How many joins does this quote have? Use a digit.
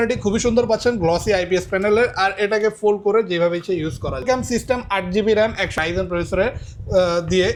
0